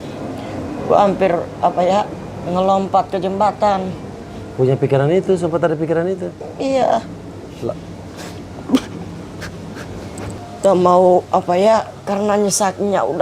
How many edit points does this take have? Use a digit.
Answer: 1